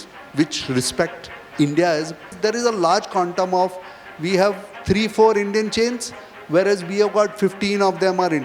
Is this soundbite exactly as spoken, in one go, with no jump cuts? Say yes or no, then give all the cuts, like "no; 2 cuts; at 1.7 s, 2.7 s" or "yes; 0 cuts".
yes; 0 cuts